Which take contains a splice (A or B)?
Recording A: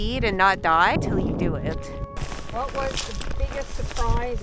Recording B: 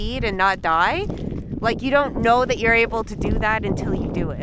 A